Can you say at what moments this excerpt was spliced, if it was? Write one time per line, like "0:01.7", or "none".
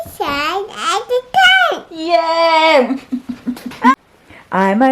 0:04.0

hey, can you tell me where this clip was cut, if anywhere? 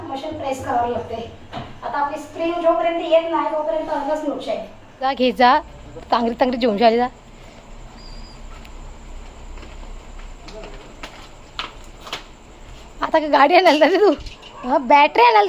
0:05.1

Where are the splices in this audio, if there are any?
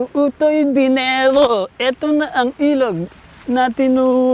none

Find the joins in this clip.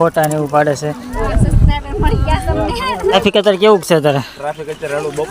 0:01.2
0:03.1

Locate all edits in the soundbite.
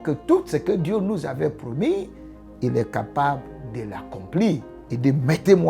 0:04.8

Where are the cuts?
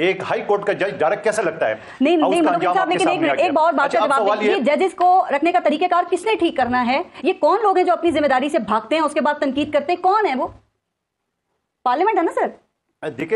none

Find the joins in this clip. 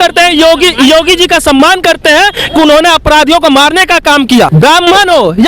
0:04.5

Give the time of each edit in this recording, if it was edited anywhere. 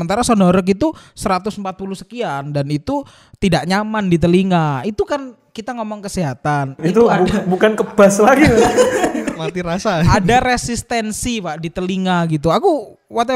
none

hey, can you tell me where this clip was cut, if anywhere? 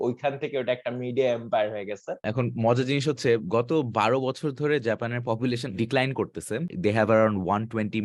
0:02.3
0:05.7
0:06.7

